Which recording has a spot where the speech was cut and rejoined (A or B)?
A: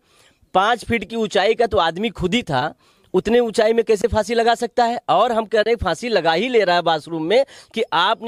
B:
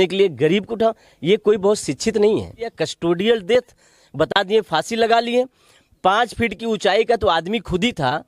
B